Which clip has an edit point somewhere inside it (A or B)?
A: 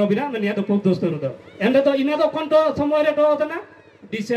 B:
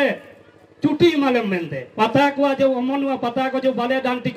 B